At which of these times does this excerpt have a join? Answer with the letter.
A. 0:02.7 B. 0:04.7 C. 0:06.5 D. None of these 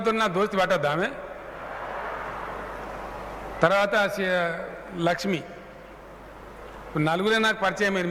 D